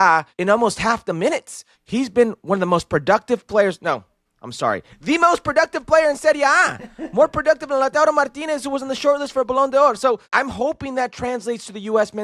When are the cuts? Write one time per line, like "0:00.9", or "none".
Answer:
0:01.7
0:10.2